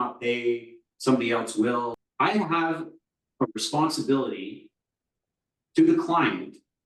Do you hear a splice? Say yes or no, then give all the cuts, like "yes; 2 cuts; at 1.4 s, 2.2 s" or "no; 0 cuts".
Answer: yes; 1 cut; at 1.9 s